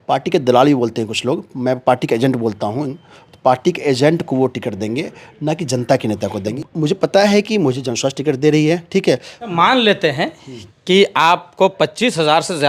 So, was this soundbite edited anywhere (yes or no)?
yes